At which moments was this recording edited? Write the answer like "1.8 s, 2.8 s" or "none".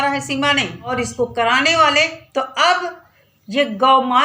0.9 s, 2.2 s